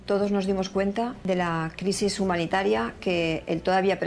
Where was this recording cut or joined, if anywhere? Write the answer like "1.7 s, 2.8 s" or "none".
1.2 s